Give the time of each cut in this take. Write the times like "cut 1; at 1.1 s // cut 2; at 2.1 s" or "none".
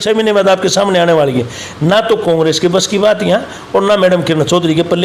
none